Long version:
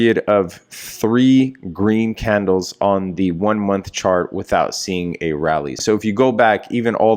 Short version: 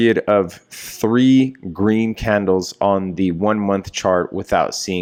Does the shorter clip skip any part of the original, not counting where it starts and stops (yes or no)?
no